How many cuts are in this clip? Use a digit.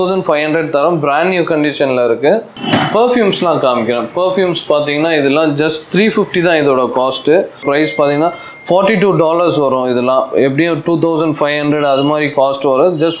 2